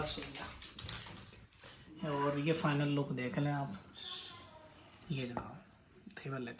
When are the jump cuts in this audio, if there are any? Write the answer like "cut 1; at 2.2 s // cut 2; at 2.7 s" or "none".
none